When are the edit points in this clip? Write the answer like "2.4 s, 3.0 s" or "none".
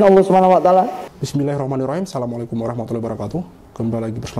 1.1 s